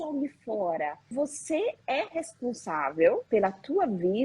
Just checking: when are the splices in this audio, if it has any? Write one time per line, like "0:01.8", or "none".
0:01.1
0:03.2